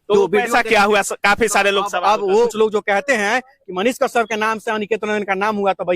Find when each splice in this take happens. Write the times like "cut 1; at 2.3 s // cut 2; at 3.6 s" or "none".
cut 1; at 2.3 s

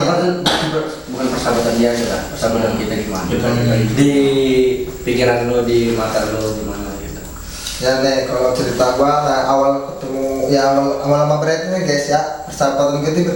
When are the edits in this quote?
none

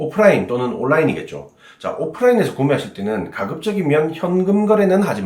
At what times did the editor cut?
none

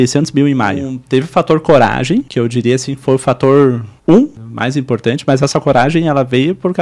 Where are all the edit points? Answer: cut 1; at 0.9 s // cut 2; at 2.3 s // cut 3; at 3.9 s // cut 4; at 4.5 s

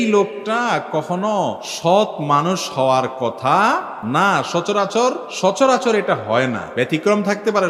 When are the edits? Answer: cut 1; at 1.7 s // cut 2; at 3.9 s // cut 3; at 5.3 s // cut 4; at 6.6 s

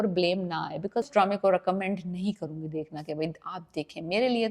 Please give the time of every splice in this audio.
cut 1; at 1.1 s

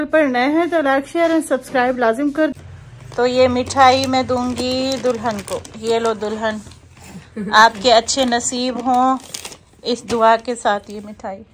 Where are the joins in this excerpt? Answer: cut 1; at 2.5 s

